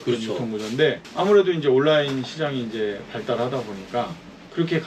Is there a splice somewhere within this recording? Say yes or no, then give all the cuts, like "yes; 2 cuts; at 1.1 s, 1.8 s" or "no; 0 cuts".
yes; 1 cut; at 1.1 s